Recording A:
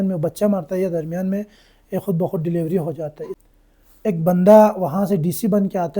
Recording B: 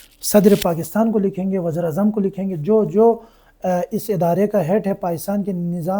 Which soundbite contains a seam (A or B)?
A